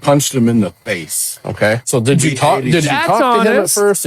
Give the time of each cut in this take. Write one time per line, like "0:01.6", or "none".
none